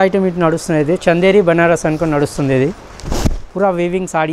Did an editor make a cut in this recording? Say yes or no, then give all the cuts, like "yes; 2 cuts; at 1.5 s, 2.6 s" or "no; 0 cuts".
no; 0 cuts